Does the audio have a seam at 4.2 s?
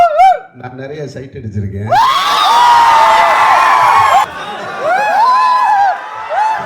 yes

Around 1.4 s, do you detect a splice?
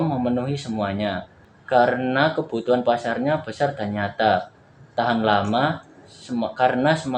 yes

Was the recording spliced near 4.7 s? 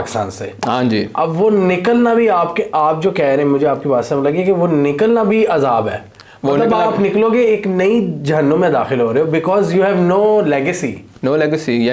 no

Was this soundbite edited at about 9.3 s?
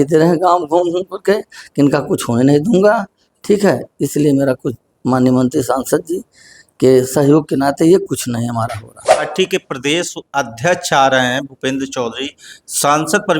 yes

